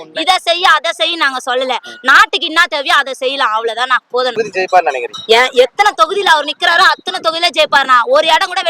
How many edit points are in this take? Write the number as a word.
one